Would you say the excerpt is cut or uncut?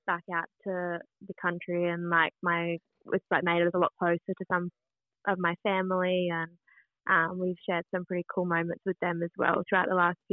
uncut